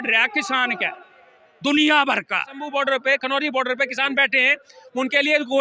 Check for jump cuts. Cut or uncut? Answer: cut